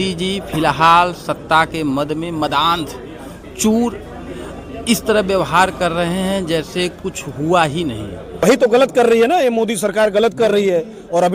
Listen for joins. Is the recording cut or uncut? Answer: cut